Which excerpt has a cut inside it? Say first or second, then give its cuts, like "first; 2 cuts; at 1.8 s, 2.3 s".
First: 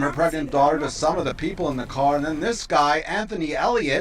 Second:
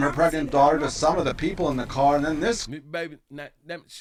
first; 1 cut; at 2.8 s